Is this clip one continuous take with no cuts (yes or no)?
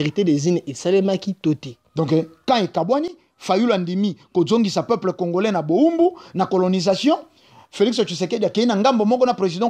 no